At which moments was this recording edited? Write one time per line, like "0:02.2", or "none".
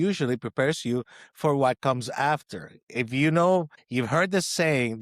0:03.8

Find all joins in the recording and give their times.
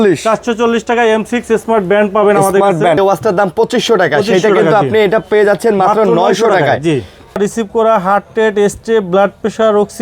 0:03.0
0:07.4

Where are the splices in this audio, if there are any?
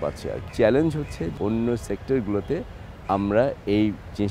none

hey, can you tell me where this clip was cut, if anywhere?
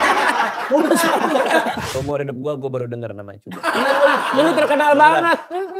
0:01.9

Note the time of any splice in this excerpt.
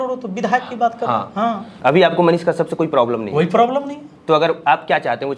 0:01.7

